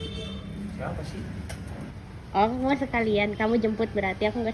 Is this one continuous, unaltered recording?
no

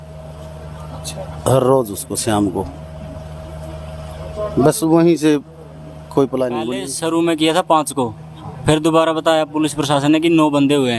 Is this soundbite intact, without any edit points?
no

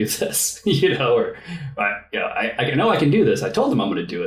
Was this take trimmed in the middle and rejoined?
no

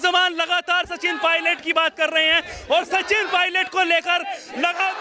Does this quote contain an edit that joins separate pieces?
no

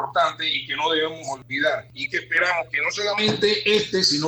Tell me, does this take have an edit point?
yes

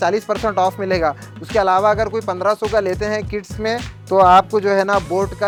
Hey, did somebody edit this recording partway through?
no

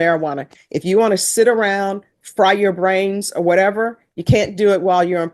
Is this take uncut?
yes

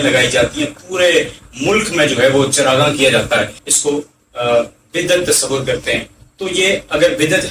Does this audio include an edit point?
yes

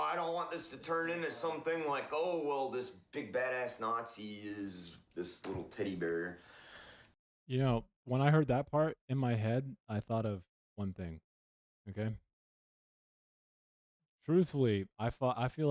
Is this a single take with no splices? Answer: yes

